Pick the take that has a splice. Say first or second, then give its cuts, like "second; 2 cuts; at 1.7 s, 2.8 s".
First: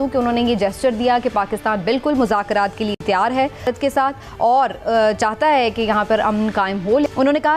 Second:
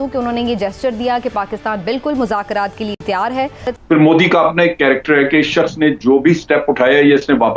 second; 1 cut; at 3.7 s